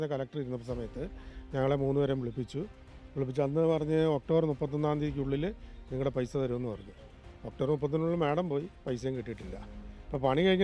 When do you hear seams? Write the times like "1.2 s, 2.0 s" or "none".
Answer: none

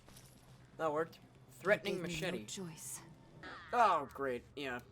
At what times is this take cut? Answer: 3.5 s

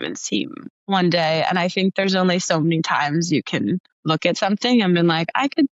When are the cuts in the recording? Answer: 3.9 s

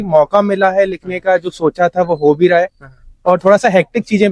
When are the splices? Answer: none

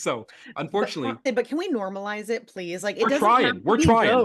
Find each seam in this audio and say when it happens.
1.2 s

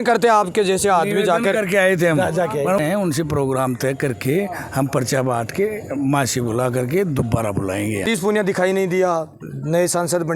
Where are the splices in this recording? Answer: 2.8 s, 8.1 s

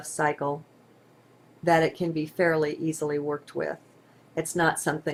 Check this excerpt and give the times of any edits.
none

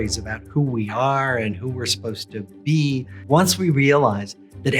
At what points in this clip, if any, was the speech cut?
3.1 s

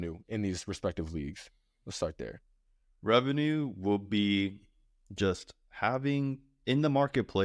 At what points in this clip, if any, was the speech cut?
none

